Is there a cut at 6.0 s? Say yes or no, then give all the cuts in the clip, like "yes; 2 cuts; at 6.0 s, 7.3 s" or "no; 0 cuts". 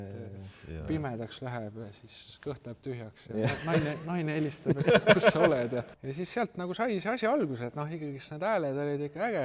yes; 1 cut; at 6.0 s